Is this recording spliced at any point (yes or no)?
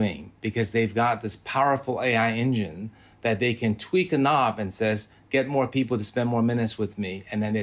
no